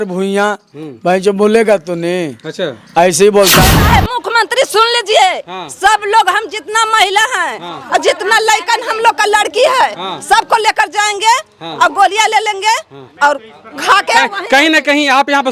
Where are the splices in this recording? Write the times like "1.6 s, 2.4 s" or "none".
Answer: 3.7 s